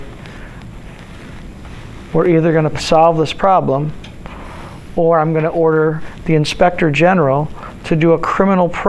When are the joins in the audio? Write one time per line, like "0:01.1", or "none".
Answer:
0:02.8
0:06.0